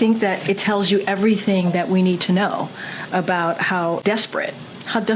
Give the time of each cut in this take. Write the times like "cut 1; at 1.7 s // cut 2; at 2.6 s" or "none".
cut 1; at 4.0 s